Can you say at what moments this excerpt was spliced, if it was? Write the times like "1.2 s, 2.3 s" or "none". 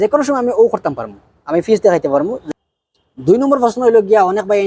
2.4 s